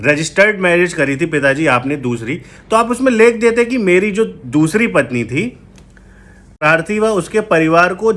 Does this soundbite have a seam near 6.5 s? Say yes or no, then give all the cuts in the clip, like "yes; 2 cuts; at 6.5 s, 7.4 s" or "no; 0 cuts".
yes; 1 cut; at 6.5 s